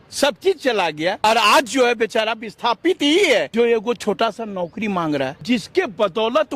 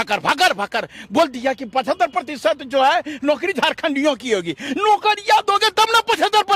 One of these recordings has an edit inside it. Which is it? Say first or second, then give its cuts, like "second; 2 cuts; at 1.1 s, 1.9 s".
first; 3 cuts; at 1.2 s, 3.5 s, 5.4 s